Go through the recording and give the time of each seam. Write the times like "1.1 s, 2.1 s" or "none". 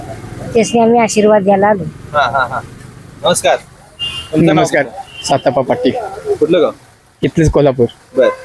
none

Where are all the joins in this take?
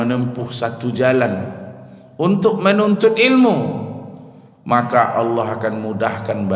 none

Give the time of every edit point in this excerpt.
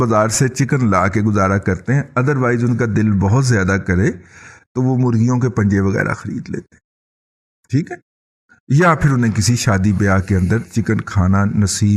none

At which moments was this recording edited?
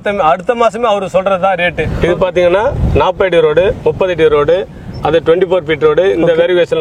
1.9 s

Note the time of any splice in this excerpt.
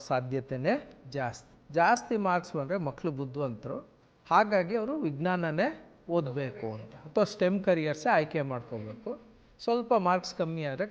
1.4 s

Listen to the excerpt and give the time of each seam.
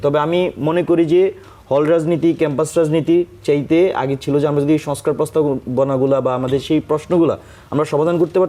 none

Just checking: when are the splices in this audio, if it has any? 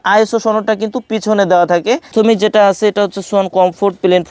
2.1 s

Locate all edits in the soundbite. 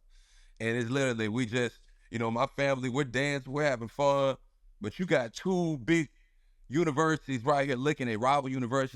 none

